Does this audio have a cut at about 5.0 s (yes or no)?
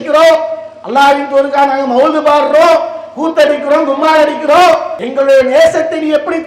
yes